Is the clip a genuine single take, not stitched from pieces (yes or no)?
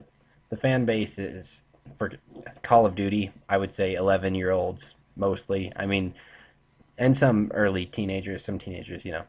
no